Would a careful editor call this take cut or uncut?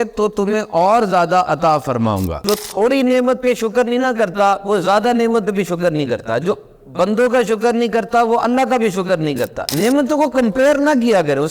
cut